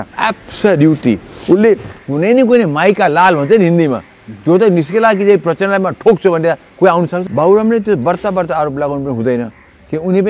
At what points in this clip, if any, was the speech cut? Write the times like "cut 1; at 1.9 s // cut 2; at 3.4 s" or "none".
cut 1; at 2.0 s // cut 2; at 7.2 s